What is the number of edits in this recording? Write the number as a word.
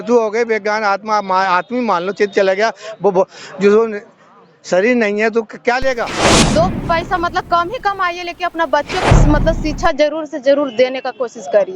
one